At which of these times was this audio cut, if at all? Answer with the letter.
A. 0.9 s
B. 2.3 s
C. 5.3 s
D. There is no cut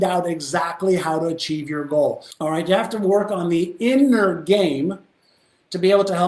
B